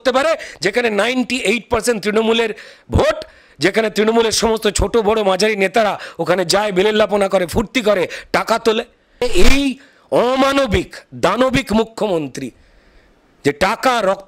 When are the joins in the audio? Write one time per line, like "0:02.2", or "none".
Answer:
0:09.2